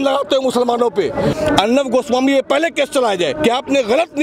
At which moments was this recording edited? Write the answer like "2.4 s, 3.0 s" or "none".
1.3 s